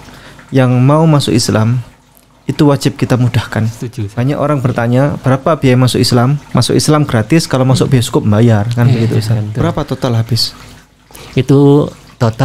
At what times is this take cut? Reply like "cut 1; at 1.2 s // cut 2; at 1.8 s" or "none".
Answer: cut 1; at 4.1 s // cut 2; at 6.4 s // cut 3; at 9.5 s